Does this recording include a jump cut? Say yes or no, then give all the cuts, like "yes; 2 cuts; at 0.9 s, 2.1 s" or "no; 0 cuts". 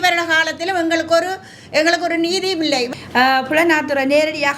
yes; 1 cut; at 2.9 s